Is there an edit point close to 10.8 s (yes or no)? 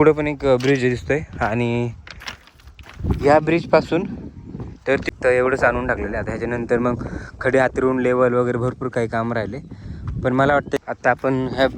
yes